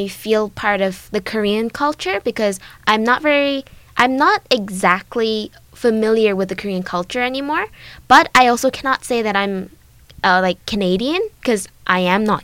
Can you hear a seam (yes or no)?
no